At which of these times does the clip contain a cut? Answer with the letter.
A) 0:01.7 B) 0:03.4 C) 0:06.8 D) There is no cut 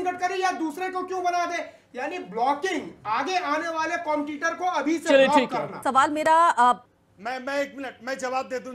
C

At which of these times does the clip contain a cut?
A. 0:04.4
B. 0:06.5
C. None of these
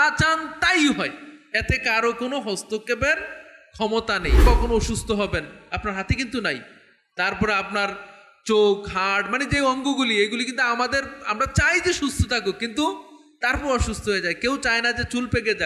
A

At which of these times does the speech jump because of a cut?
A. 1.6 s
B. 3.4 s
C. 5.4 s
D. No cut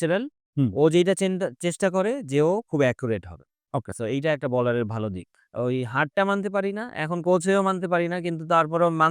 C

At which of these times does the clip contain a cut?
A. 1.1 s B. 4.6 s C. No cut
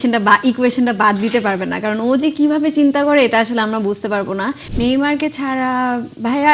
B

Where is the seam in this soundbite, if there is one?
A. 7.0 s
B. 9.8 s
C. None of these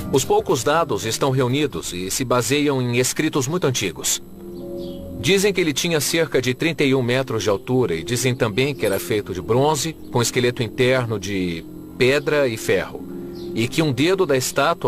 A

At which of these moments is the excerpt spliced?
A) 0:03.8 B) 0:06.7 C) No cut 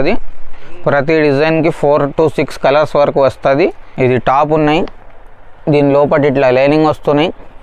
A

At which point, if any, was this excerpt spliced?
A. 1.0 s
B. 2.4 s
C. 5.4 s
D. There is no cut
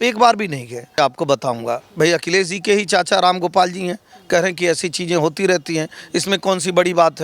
A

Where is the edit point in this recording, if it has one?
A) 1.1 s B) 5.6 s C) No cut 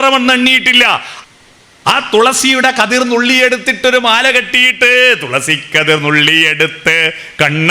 A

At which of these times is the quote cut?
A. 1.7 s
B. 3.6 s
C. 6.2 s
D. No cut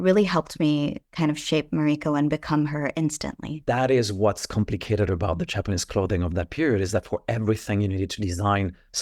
B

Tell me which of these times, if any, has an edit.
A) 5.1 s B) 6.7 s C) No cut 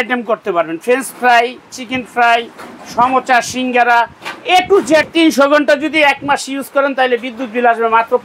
A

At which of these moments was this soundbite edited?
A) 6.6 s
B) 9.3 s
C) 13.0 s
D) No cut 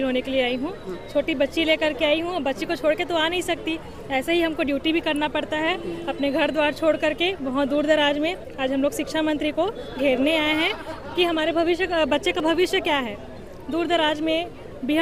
D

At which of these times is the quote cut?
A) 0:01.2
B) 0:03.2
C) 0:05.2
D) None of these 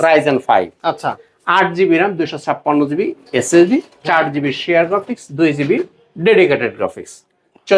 D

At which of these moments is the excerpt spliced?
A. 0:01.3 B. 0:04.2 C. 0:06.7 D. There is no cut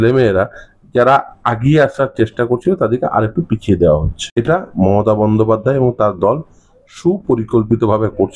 B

